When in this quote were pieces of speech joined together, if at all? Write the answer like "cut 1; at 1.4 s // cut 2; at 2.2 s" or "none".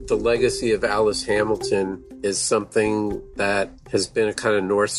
cut 1; at 2.0 s // cut 2; at 3.8 s